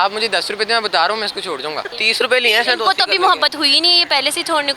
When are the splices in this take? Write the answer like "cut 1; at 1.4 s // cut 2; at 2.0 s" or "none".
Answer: cut 1; at 2.0 s

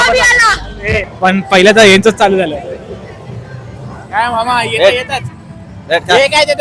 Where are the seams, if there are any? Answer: cut 1; at 1.0 s

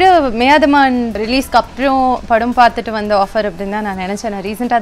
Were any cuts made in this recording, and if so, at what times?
cut 1; at 1.2 s

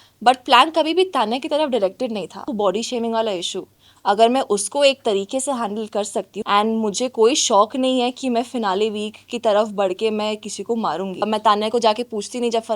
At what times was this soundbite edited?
cut 1; at 2.5 s // cut 2; at 6.4 s // cut 3; at 11.3 s

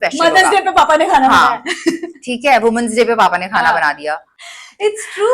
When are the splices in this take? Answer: none

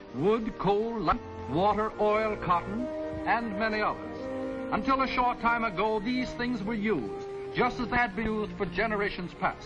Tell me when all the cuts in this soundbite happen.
cut 1; at 1.9 s

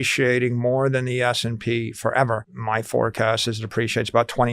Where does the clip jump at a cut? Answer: cut 1; at 2.5 s

